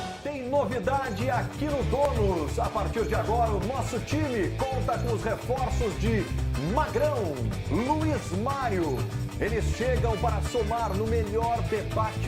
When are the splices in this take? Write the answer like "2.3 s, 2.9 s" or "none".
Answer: 4.8 s